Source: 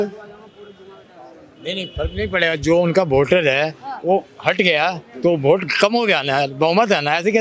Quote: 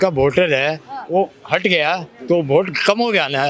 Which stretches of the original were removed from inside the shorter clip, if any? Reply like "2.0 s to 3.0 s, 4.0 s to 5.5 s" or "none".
none